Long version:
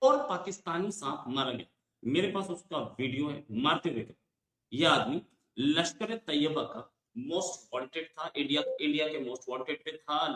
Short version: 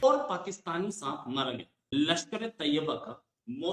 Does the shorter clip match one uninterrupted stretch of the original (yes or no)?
no